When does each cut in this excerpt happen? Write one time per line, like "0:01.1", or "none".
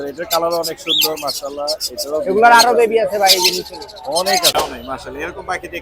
0:04.5